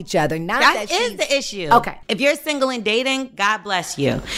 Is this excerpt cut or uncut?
cut